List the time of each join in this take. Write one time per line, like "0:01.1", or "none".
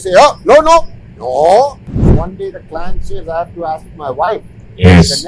0:02.0